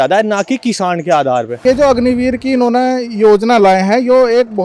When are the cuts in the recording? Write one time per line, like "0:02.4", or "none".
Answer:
0:01.6

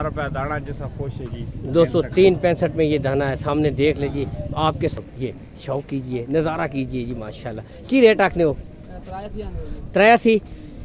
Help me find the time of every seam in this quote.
0:04.9

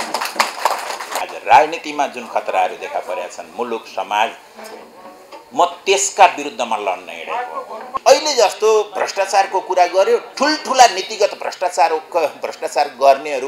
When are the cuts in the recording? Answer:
0:01.2
0:08.0

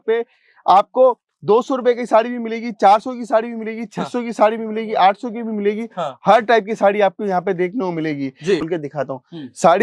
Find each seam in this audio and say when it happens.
0:08.6

